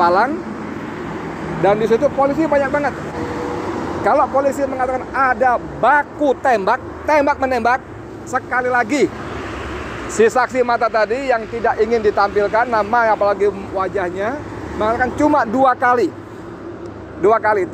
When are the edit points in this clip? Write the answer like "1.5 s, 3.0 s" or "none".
3.2 s